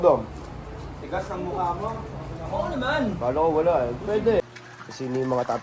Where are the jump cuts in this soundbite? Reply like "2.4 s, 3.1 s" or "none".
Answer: 4.4 s